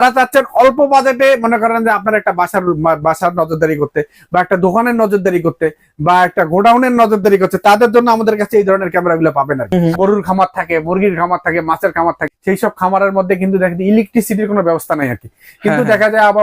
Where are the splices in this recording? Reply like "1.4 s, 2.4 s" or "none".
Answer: 9.6 s, 12.3 s